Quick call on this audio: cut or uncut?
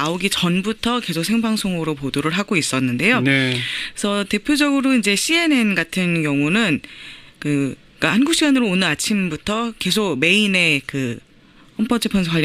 cut